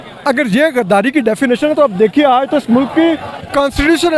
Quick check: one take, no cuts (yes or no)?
yes